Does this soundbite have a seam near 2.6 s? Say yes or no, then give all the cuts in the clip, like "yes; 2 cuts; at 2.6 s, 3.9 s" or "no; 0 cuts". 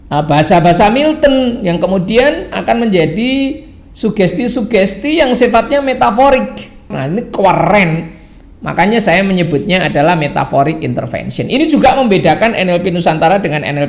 yes; 2 cuts; at 2.6 s, 7.0 s